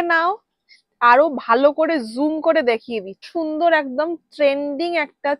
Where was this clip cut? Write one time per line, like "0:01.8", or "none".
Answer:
0:03.3